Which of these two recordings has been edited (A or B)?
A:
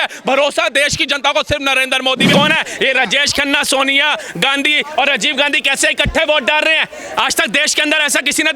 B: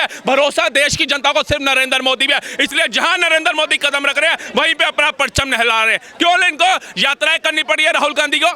A